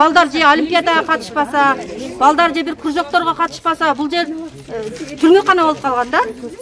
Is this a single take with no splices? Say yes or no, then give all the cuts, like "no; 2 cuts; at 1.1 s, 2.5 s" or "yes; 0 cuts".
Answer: yes; 0 cuts